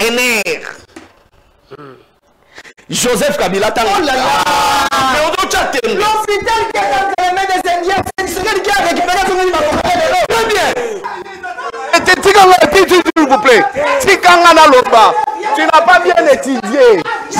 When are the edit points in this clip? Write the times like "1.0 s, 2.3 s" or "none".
11.0 s